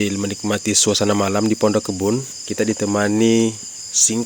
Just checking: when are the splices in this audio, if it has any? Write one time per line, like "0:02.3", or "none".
0:02.4